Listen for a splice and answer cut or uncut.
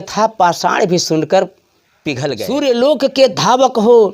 cut